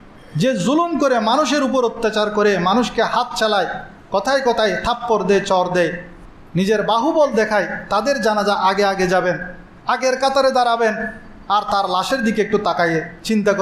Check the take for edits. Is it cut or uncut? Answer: uncut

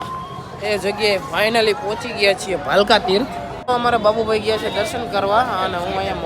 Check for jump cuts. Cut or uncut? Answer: cut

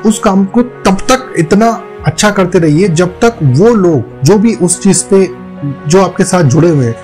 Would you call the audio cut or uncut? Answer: uncut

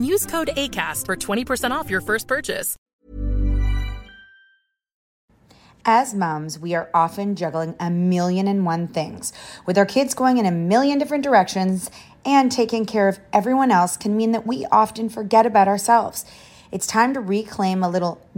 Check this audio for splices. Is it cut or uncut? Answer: cut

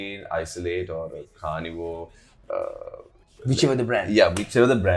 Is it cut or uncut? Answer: uncut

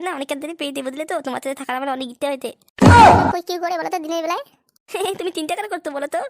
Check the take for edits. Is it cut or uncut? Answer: cut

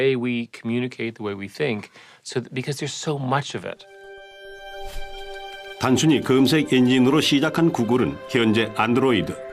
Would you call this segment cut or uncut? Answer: cut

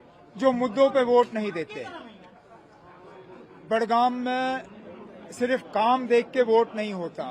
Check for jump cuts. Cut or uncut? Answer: uncut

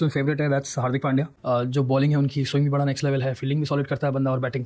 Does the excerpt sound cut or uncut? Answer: uncut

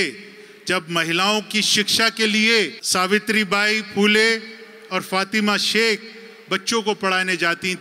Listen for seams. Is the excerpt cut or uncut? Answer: cut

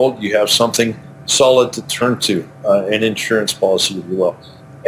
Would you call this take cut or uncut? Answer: uncut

